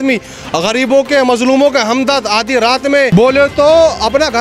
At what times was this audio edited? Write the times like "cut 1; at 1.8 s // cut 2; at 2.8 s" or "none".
cut 1; at 3.1 s